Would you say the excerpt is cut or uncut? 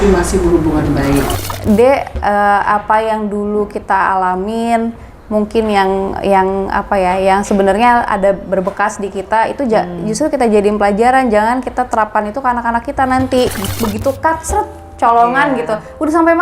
cut